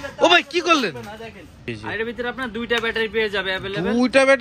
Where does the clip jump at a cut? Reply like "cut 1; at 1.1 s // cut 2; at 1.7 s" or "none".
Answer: cut 1; at 1.6 s

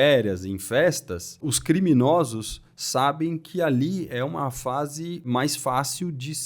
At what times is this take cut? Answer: cut 1; at 1.5 s // cut 2; at 5.2 s

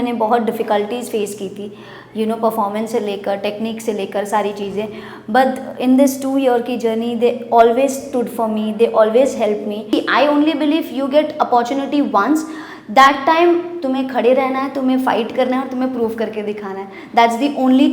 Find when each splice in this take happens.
cut 1; at 9.9 s

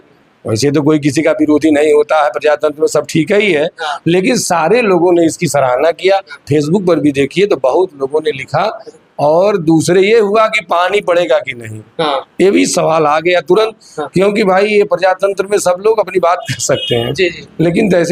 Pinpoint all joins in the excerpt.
none

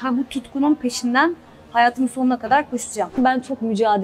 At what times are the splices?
cut 1; at 3.1 s

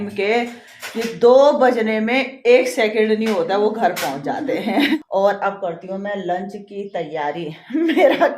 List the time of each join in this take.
cut 1; at 4.9 s

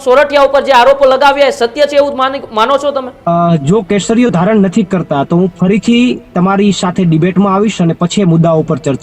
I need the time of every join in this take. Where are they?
cut 1; at 3.1 s

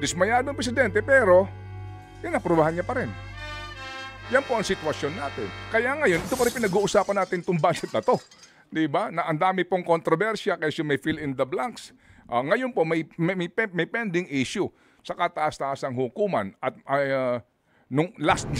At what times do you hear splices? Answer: none

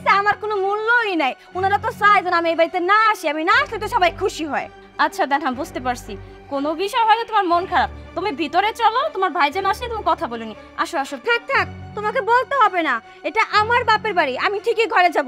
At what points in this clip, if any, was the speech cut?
none

